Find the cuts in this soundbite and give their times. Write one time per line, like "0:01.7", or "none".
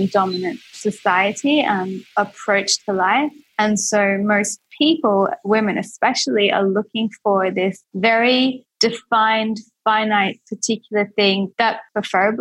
none